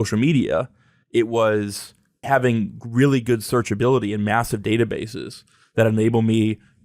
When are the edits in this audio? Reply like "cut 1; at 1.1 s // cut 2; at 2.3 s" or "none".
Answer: cut 1; at 2.2 s